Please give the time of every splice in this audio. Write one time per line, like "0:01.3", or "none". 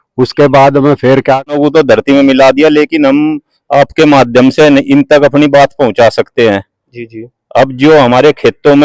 0:01.5